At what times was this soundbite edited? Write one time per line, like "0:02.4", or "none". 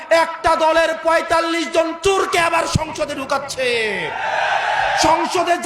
none